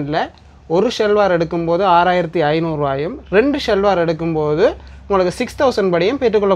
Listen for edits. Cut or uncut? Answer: uncut